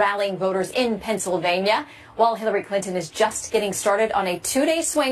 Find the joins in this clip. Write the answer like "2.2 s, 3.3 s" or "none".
2.4 s